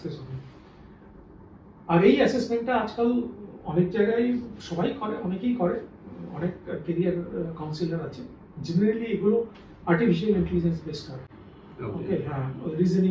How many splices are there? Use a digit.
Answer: 0